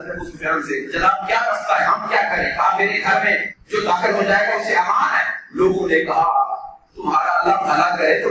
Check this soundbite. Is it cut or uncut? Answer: uncut